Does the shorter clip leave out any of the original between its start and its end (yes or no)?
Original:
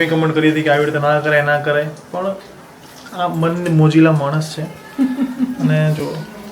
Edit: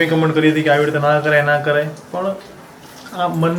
no